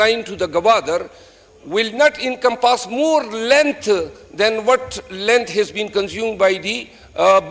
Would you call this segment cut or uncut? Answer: uncut